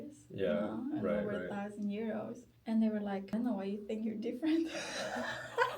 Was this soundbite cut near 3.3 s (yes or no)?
yes